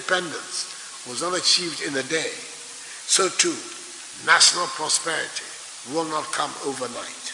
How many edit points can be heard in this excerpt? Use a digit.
0